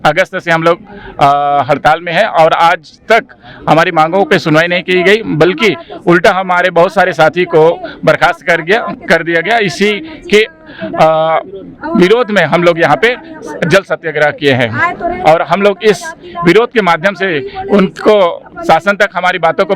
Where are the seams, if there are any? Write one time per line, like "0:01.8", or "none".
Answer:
none